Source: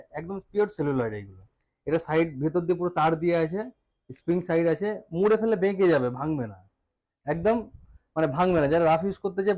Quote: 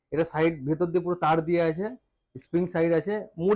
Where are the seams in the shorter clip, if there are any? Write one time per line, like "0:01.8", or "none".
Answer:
none